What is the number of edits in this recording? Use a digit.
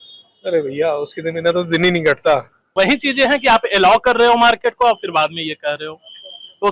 1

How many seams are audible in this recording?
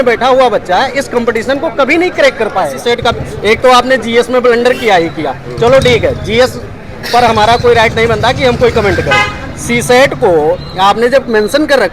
1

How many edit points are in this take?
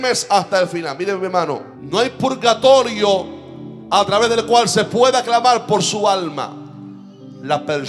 1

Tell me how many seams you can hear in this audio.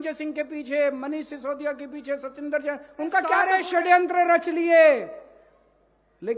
1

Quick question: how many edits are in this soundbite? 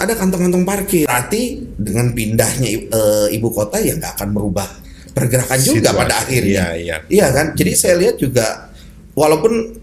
1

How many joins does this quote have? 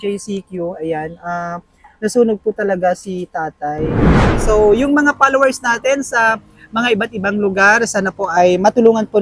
1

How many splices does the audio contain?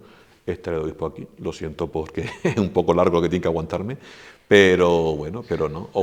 0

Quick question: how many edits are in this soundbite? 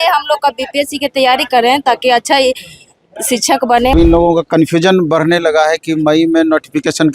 1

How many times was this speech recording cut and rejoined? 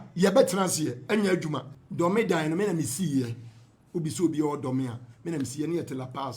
1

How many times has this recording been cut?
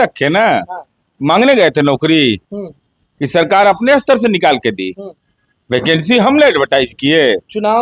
0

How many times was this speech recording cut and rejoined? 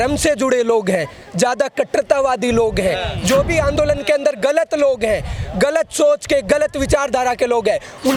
0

